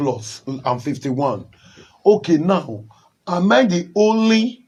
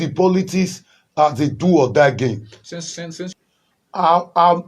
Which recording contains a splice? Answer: second; 1 cut; at 3.3 s

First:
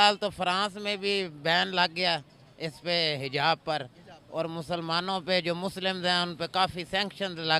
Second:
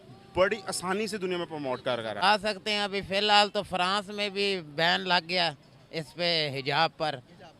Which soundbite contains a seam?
second; 1 cut; at 2.2 s

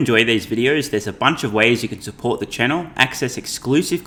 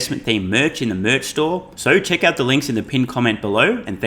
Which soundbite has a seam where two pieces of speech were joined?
second; 1 cut; at 1.7 s

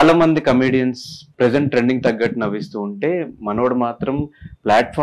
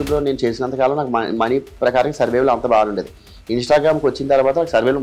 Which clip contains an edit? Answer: first; 1 cut; at 1.3 s

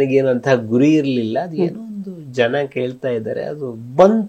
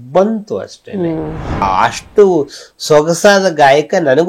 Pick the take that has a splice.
second; 1 cut; at 1.6 s

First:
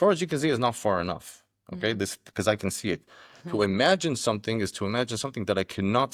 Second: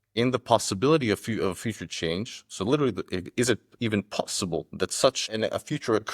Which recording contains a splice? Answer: second; 1 cut; at 5.2 s

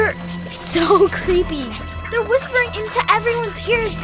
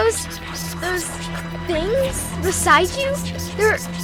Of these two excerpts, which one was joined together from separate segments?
first; 1 cut; at 1.7 s

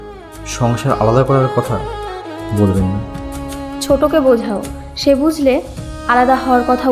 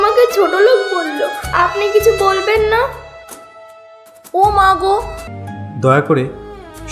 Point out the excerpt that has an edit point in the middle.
second; 1 cut; at 5.2 s

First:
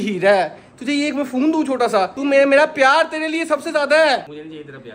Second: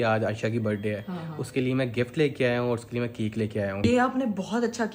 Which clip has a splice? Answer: second; 1 cut; at 3.8 s

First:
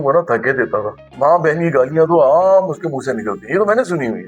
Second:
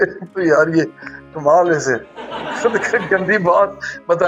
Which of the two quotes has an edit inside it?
first; 1 cut; at 1.0 s

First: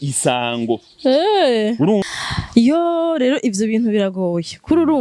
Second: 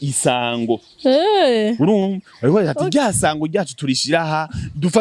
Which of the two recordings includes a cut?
first; 1 cut; at 2.2 s

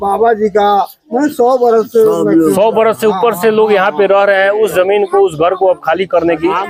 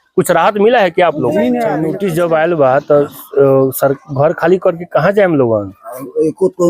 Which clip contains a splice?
second; 1 cut; at 1.8 s

